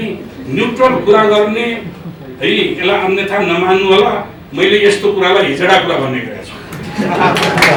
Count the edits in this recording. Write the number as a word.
zero